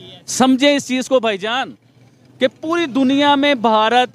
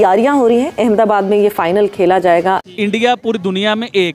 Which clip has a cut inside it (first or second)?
second